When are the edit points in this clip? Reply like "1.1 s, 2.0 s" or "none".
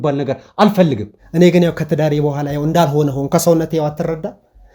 1.1 s